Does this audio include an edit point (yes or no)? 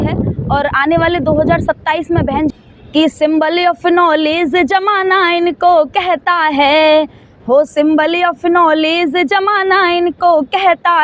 yes